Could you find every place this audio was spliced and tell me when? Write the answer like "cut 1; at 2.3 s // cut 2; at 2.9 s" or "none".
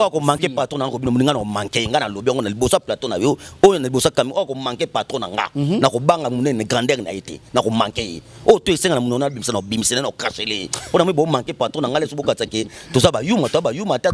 none